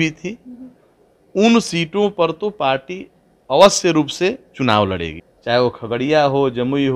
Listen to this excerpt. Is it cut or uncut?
cut